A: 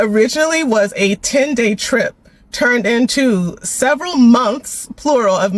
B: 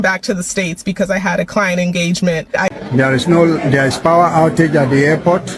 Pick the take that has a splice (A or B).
B